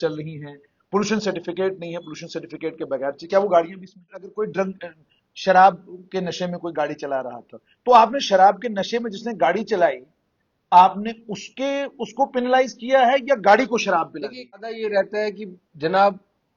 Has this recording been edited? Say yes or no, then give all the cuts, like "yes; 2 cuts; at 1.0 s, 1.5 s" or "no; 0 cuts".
yes; 2 cuts; at 4.3 s, 14.6 s